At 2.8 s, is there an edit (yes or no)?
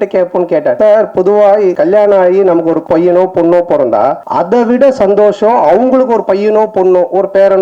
yes